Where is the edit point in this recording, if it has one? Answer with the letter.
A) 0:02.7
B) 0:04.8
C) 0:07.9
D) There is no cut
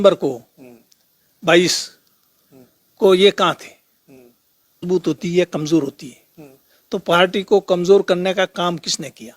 B